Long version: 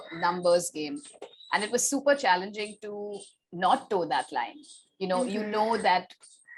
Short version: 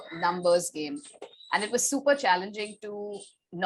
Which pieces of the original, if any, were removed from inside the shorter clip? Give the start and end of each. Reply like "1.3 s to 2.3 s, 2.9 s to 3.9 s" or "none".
none